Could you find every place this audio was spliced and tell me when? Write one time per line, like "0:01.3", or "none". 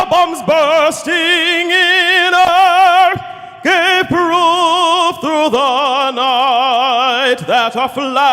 0:04.1